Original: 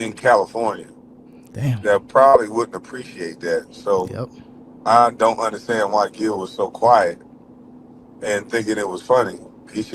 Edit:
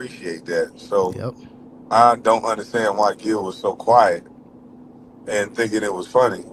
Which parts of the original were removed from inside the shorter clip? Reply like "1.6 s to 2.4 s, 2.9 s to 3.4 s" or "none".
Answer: none